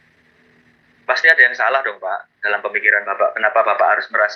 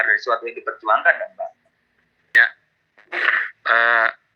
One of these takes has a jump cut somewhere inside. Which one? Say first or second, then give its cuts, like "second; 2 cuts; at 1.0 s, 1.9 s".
second; 1 cut; at 2.3 s